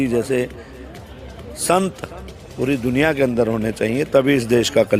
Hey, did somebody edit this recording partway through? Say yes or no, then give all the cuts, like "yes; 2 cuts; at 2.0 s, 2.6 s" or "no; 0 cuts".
no; 0 cuts